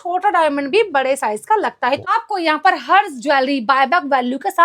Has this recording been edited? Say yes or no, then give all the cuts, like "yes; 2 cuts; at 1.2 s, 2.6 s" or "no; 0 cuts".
yes; 1 cut; at 2.0 s